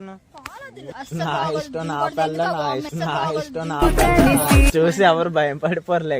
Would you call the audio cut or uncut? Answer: cut